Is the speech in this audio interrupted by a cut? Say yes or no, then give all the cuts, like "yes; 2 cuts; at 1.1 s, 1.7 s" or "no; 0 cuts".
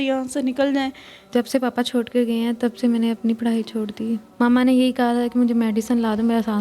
yes; 2 cuts; at 1.3 s, 4.3 s